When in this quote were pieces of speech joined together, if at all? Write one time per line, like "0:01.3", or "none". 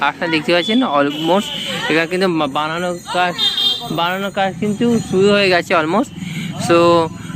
none